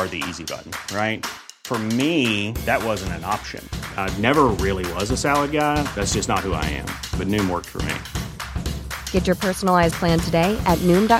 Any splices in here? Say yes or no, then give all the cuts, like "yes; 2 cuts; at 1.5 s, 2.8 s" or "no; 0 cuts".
no; 0 cuts